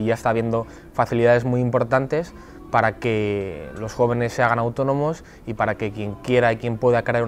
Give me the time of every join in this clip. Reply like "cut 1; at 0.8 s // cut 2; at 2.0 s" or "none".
none